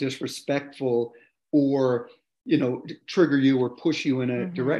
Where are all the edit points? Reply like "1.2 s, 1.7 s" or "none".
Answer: none